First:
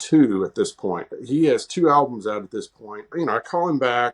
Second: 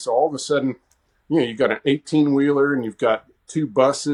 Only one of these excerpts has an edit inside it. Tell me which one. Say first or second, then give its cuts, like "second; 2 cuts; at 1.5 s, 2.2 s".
first; 2 cuts; at 1.1 s, 3.1 s